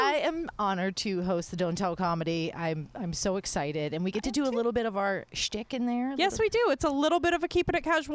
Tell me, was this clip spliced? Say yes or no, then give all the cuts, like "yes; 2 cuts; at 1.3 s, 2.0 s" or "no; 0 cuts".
no; 0 cuts